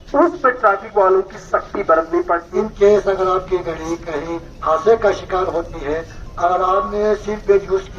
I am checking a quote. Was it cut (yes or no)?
yes